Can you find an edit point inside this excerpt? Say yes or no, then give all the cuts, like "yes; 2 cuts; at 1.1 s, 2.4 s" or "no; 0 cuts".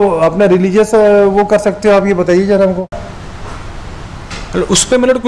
yes; 1 cut; at 2.9 s